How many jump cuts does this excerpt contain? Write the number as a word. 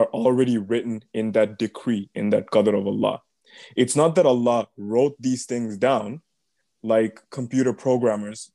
zero